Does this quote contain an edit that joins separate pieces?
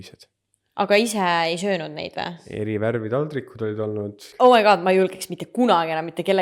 yes; 2 cuts; at 2.4 s, 4.2 s

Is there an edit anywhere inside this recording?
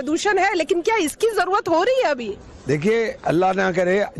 no; 0 cuts

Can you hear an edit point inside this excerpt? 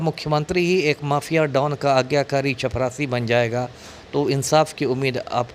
no; 0 cuts

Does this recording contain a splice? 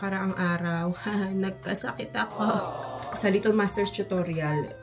yes; 1 cut; at 2.8 s

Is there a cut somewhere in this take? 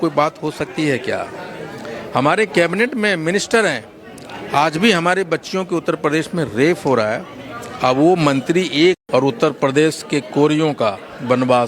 yes; 1 cut; at 9.0 s

